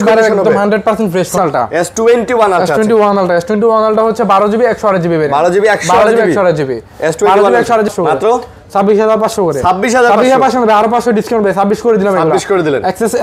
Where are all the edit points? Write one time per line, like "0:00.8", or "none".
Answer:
0:01.4
0:07.9